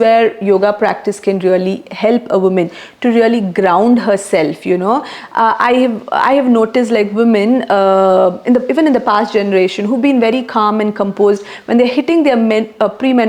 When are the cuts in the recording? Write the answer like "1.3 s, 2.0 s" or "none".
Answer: none